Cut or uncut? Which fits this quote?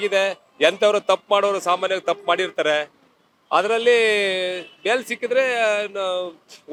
uncut